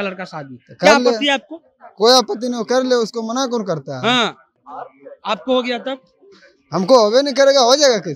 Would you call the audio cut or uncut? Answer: uncut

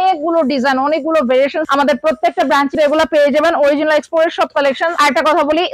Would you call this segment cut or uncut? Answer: cut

